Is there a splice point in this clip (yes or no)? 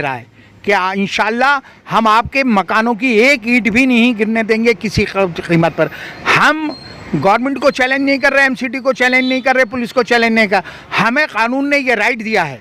no